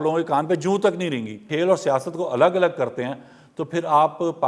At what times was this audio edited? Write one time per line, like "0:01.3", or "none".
0:01.4